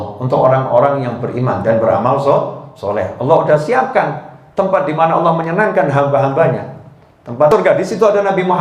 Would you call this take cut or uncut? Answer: cut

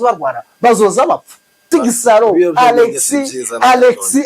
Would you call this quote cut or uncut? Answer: cut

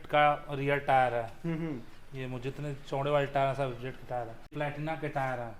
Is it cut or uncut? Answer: cut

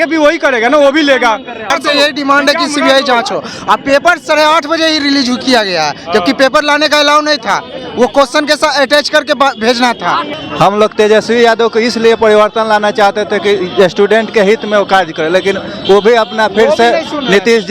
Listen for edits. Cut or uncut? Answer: cut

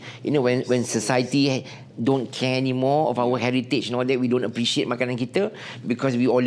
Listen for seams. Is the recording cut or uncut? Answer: uncut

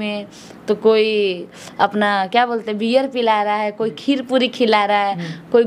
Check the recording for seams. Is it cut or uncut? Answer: uncut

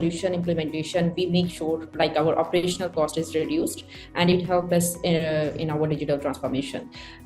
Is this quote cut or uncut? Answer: uncut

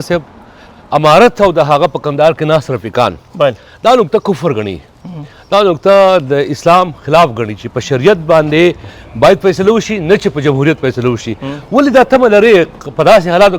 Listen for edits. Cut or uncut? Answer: uncut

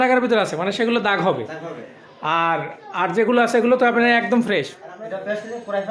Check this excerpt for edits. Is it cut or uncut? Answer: cut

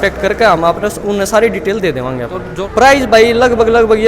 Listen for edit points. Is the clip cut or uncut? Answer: cut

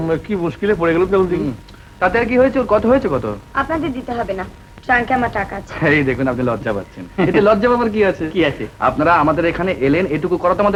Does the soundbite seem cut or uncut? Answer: uncut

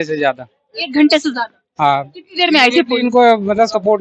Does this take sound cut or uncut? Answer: uncut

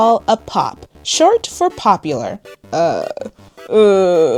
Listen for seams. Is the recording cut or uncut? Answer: uncut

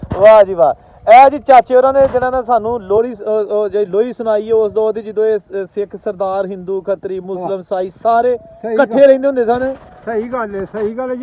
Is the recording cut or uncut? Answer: uncut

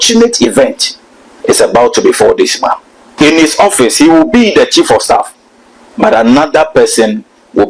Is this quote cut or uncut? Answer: cut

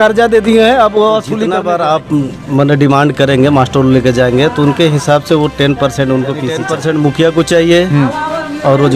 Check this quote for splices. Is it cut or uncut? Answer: cut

